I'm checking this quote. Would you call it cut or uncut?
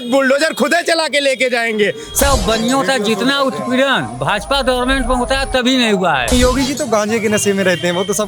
cut